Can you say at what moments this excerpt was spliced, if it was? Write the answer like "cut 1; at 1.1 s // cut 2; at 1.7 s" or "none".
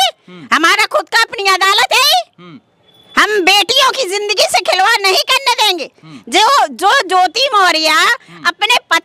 none